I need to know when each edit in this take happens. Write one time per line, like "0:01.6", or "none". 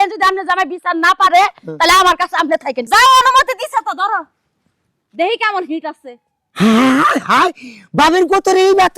0:02.8